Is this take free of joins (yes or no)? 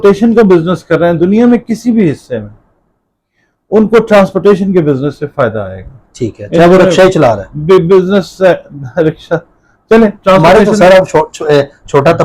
yes